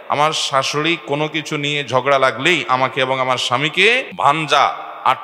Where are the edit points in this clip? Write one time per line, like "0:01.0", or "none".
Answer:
0:04.1